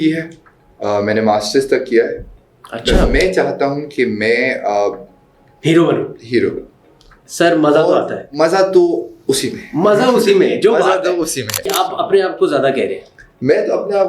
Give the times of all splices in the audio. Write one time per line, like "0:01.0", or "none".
0:03.0
0:11.7

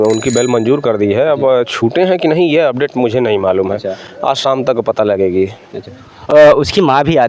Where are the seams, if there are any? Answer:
none

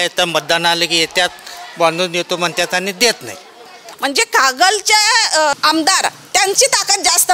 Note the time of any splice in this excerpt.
0:03.8
0:05.5

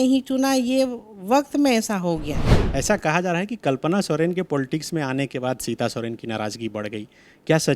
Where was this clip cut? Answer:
0:02.5

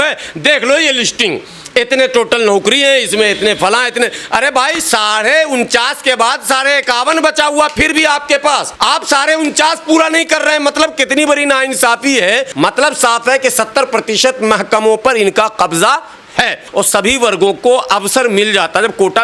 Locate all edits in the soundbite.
0:12.5
0:16.6

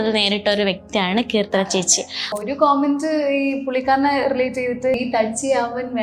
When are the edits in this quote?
0:02.4
0:05.0

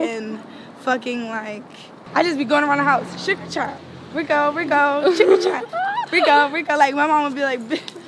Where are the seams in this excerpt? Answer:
0:02.0

